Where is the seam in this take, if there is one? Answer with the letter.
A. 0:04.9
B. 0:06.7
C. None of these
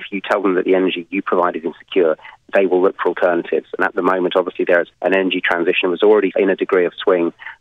A